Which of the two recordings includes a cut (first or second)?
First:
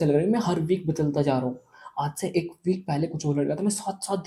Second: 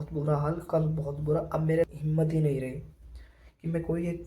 second